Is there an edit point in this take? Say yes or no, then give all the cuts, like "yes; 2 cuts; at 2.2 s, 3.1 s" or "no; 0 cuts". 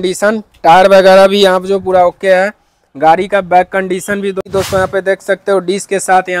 yes; 1 cut; at 4.5 s